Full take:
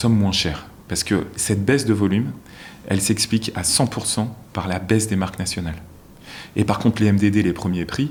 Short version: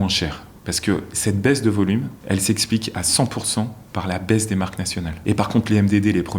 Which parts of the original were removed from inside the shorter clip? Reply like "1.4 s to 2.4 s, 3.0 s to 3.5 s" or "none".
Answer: 2.4 s to 2.7 s, 5.7 s to 6.4 s